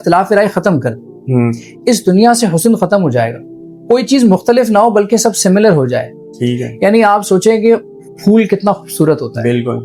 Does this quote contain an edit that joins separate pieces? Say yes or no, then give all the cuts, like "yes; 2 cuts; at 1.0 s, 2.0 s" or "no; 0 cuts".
no; 0 cuts